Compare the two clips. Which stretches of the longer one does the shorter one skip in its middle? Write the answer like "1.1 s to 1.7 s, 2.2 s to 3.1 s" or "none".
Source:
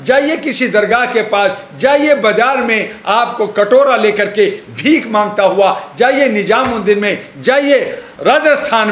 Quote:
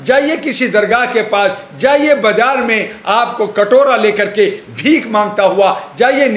none

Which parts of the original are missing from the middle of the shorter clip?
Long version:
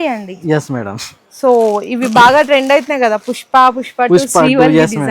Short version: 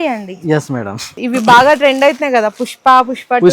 1.2 s to 1.9 s

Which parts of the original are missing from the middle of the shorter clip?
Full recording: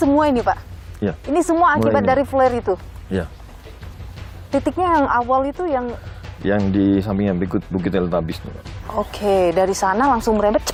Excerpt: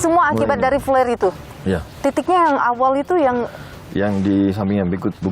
3.3 s to 4.4 s

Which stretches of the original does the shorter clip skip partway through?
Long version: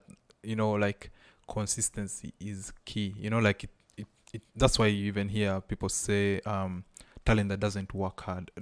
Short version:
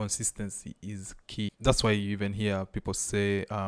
3.1 s to 4.5 s

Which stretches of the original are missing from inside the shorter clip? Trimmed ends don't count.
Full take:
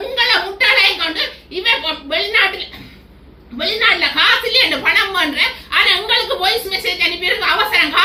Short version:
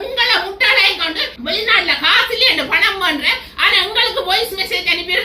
1.3 s to 3.4 s

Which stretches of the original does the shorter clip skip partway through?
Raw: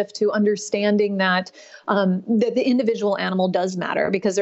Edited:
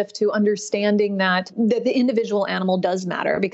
1.5 s to 2.2 s

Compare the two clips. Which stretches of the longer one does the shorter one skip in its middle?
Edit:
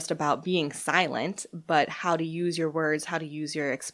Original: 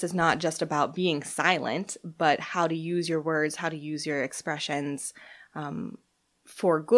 none

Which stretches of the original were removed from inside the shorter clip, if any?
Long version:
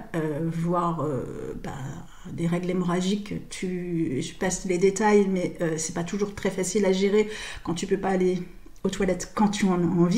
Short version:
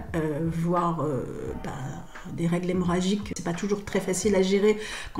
3.4 s to 5.9 s

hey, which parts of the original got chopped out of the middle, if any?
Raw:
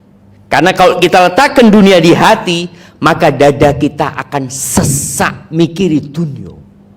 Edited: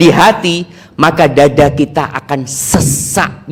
none

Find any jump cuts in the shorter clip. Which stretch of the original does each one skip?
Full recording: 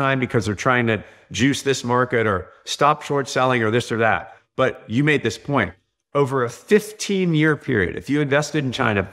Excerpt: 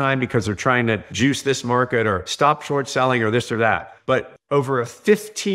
1.1 s to 1.3 s, 2.5 s to 2.7 s, 4.5 s to 5.7 s

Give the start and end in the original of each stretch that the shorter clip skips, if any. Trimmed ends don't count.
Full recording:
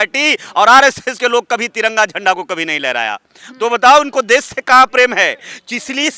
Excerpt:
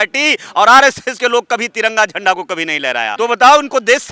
3.1 s to 3.5 s

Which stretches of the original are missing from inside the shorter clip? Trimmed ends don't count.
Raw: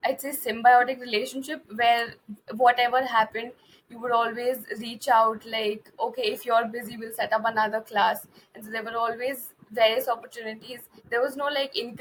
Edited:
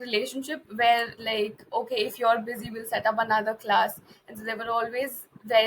2.2 s to 5.5 s

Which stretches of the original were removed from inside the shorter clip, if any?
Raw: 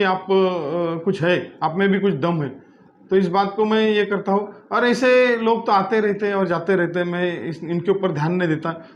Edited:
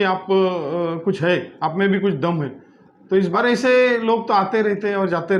3.3 s to 4.7 s

